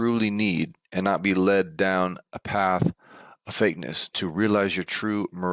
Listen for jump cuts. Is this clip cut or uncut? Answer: cut